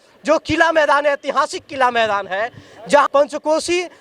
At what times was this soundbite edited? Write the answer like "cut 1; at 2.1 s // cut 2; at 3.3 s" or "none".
cut 1; at 3.1 s